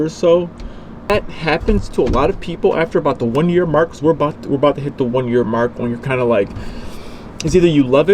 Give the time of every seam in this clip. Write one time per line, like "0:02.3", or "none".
0:01.1